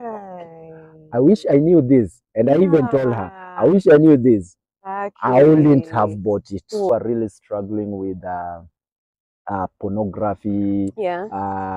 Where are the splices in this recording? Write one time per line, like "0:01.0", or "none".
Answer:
0:06.9